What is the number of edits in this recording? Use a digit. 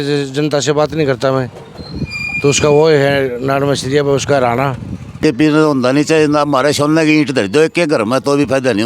1